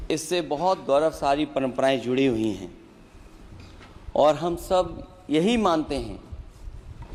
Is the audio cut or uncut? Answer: uncut